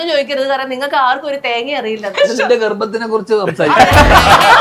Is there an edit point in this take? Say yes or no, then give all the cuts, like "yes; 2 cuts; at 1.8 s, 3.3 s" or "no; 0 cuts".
yes; 1 cut; at 2.1 s